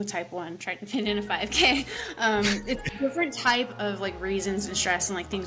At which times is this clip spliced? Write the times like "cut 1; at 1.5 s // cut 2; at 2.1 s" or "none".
cut 1; at 2.8 s